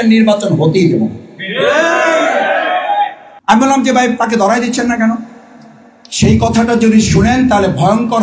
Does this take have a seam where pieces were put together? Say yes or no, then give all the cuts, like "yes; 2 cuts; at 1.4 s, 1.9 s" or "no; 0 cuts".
yes; 1 cut; at 3.3 s